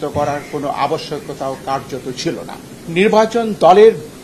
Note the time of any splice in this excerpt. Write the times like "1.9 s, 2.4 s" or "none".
2.7 s